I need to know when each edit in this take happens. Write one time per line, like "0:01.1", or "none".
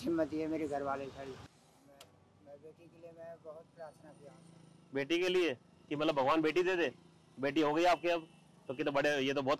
0:01.6